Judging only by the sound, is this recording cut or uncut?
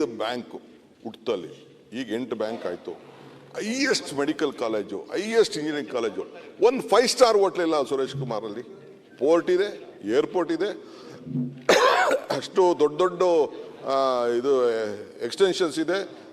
uncut